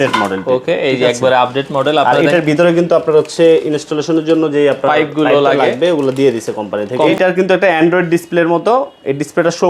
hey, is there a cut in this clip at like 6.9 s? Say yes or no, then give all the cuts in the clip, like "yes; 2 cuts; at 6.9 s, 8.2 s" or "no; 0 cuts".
yes; 1 cut; at 6.9 s